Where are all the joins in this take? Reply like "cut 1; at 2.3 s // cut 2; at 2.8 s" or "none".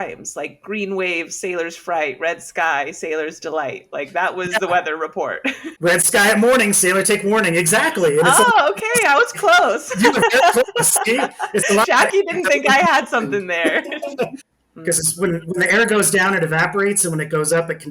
cut 1; at 14.4 s